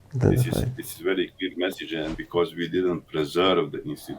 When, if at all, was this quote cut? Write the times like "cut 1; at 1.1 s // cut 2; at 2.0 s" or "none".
cut 1; at 2.1 s